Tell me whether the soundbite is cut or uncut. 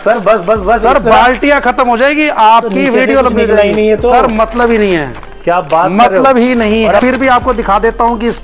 cut